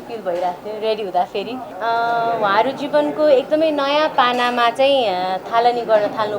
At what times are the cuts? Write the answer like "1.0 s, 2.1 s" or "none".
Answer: 1.7 s